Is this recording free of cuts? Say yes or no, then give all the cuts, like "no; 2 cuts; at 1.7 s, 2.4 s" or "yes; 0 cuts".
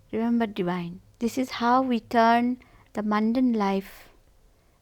no; 1 cut; at 1.0 s